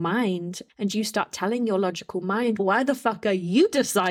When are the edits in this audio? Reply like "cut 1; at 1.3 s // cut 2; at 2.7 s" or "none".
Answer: cut 1; at 2.6 s